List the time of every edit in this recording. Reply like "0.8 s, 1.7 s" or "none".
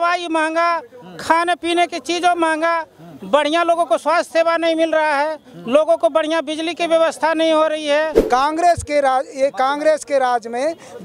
8.2 s